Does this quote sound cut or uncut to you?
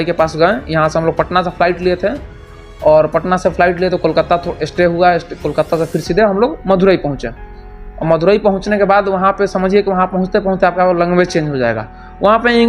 uncut